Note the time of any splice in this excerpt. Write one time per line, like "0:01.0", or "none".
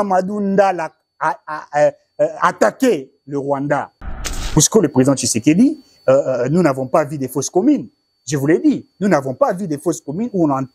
0:04.2

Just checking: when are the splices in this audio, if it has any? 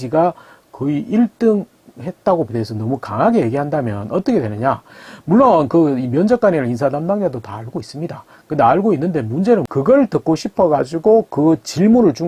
0:02.5
0:09.7

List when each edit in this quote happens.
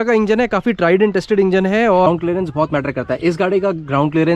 0:02.1

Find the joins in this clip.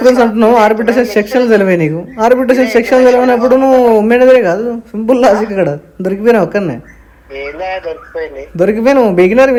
none

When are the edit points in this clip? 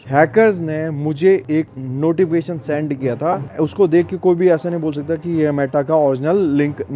0:01.5
0:03.5

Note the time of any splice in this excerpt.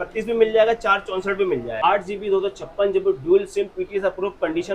0:01.8

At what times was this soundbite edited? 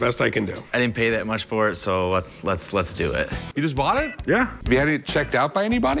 0:03.5
0:04.6

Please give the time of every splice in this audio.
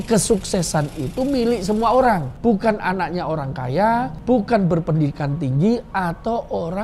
0:02.3
0:04.1

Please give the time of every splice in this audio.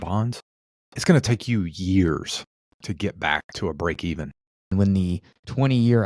0:04.7

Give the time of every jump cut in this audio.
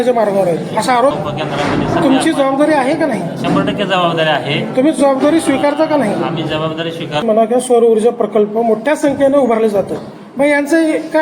0:01.1
0:07.2

